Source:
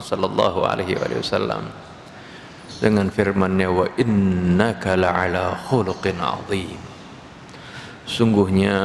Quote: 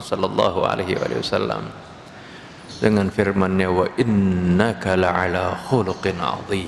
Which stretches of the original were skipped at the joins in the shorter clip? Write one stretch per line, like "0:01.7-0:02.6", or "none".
none